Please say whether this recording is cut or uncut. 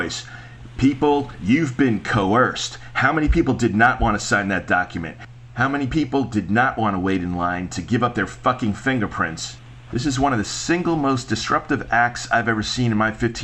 uncut